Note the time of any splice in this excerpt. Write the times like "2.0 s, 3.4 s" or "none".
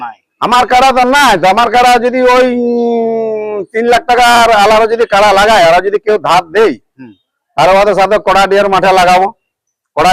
none